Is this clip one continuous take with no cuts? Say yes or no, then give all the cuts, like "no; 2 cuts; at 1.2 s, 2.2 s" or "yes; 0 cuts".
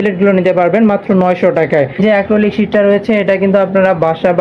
no; 1 cut; at 2.0 s